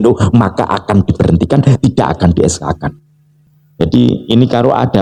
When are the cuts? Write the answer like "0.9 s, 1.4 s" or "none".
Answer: none